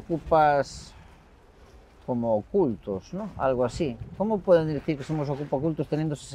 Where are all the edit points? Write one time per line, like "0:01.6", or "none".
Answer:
none